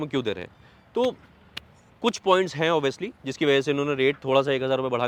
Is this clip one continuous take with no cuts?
yes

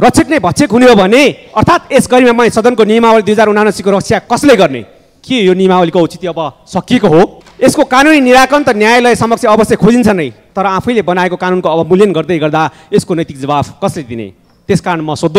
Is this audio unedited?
no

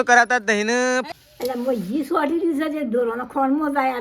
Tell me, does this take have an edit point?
yes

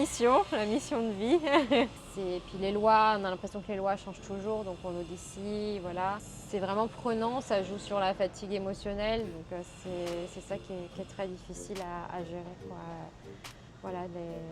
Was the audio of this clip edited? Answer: yes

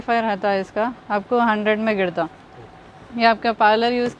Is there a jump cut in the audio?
no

